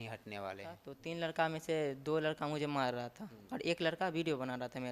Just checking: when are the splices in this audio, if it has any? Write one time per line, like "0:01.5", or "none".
0:00.9